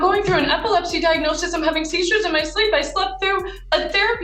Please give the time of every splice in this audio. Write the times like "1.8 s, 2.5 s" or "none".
none